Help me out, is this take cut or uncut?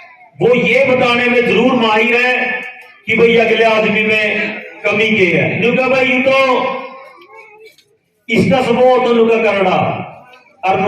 cut